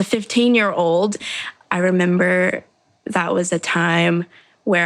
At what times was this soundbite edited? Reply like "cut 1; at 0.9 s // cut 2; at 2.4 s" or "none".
cut 1; at 1.2 s